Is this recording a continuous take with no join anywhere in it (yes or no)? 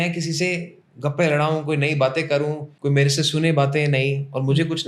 no